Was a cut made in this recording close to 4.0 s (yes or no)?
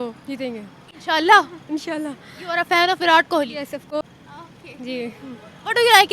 yes